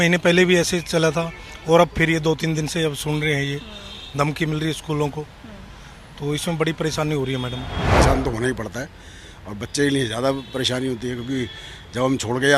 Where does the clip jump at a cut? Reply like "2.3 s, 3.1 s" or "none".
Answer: 7.9 s